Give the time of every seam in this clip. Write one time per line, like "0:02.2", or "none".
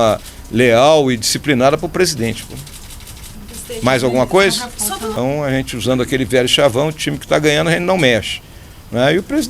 0:05.1